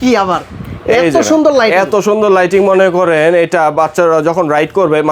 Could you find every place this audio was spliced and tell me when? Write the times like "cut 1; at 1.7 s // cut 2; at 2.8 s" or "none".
none